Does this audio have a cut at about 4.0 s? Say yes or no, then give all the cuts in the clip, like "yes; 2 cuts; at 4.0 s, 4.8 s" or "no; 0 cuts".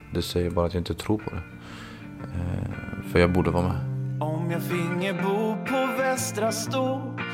yes; 1 cut; at 4.0 s